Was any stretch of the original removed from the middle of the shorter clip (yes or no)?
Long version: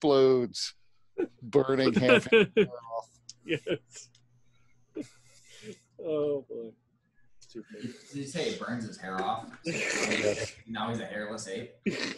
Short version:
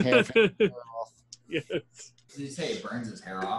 yes